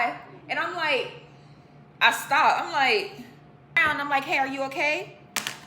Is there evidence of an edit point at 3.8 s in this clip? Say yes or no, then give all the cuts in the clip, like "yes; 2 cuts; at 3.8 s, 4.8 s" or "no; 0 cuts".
yes; 1 cut; at 3.8 s